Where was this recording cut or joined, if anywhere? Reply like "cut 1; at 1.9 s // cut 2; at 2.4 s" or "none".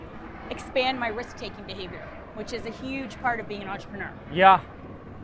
none